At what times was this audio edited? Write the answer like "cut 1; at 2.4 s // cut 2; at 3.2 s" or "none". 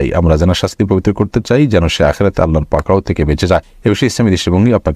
cut 1; at 3.7 s